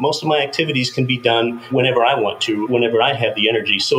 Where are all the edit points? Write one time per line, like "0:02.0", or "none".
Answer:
0:01.6
0:02.7